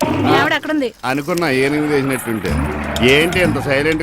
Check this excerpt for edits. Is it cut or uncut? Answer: uncut